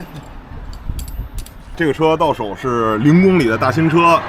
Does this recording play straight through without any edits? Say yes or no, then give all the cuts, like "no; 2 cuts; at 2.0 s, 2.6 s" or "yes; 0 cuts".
no; 1 cut; at 1.7 s